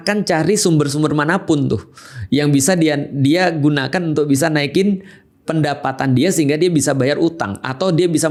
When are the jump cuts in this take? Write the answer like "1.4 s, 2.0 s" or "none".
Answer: none